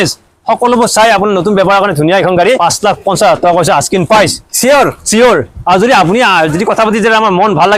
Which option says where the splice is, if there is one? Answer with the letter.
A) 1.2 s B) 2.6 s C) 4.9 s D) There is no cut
B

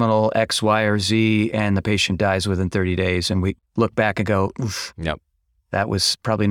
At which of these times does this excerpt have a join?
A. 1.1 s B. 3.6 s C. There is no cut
B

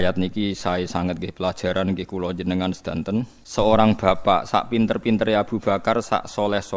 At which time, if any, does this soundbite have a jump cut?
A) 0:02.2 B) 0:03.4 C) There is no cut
B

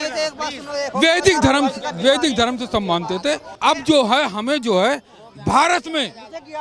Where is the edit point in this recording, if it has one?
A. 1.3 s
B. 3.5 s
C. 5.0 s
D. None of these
B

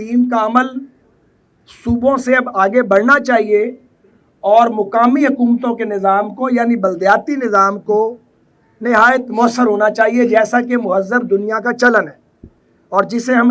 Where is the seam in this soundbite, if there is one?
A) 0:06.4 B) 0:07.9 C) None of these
C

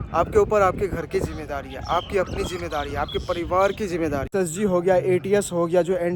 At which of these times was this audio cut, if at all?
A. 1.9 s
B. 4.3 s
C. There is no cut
B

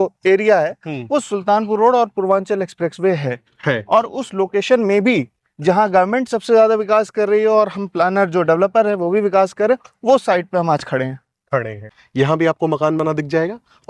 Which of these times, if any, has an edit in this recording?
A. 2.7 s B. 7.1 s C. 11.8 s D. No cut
C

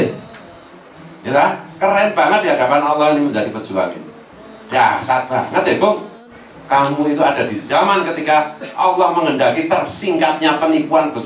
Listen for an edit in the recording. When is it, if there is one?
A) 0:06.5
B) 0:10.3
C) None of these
A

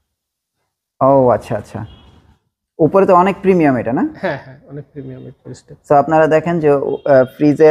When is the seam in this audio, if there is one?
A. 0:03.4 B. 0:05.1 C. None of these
C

